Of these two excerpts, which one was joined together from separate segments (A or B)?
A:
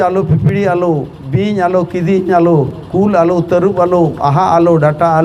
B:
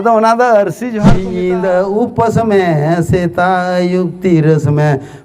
B